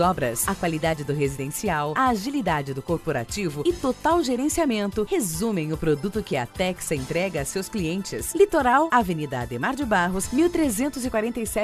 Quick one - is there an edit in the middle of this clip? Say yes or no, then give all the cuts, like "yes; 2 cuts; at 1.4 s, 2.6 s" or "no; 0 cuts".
no; 0 cuts